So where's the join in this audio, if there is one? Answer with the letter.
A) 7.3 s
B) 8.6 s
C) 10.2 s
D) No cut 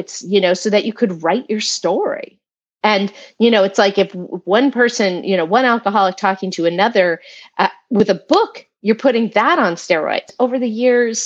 C